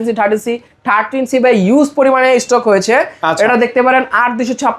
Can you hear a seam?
no; 0 cuts

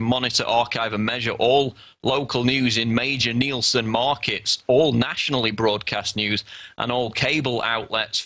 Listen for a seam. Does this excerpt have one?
yes; 1 cut; at 4.8 s

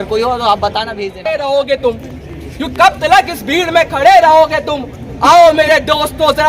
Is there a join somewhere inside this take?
yes; 1 cut; at 1.1 s

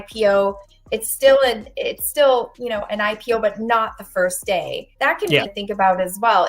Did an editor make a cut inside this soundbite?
yes; 1 cut; at 5.5 s

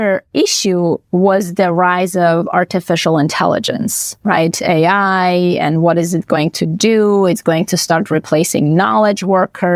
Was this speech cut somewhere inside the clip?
no; 0 cuts

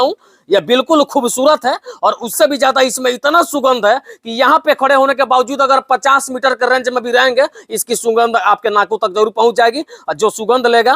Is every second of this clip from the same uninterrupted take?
yes; 0 cuts

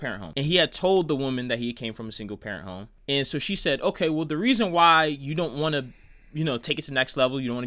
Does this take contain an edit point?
no; 0 cuts

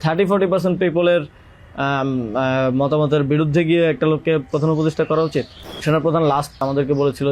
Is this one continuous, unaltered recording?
no; 2 cuts; at 5.8 s, 6.6 s

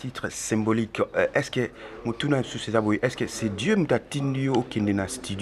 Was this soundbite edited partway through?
no; 0 cuts

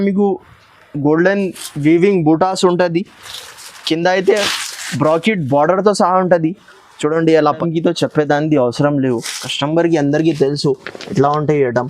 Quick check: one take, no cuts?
no; 1 cut; at 7.6 s

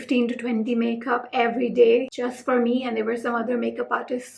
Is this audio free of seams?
yes; 0 cuts

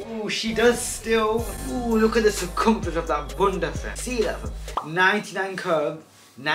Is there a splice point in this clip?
no; 0 cuts

